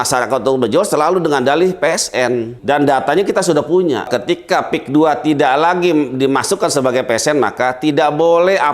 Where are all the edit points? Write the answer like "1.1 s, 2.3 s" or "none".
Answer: 2.5 s, 4.1 s